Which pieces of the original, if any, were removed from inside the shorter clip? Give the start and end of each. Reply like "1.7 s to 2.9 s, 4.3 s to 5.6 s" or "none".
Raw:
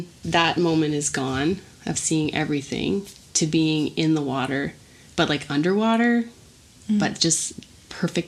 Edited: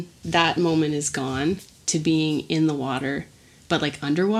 1.7 s to 3.2 s